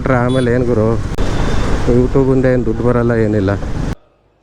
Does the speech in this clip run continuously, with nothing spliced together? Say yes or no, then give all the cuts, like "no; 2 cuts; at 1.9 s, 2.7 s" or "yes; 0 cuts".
yes; 0 cuts